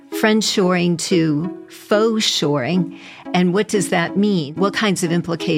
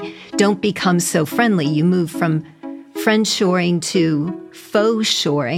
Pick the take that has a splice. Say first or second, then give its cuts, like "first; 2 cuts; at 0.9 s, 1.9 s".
first; 1 cut; at 4.5 s